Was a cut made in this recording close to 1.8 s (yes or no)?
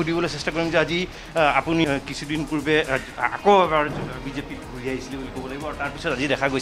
yes